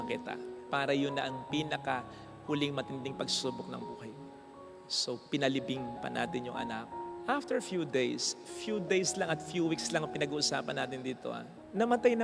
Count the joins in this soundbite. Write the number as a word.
zero